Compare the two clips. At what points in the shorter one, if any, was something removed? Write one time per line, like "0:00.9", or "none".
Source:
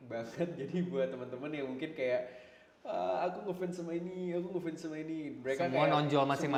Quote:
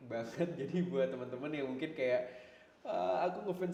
none